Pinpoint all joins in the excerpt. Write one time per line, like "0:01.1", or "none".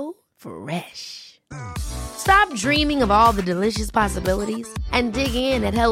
none